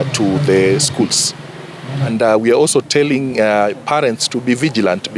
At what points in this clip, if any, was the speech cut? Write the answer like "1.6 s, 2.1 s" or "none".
2.1 s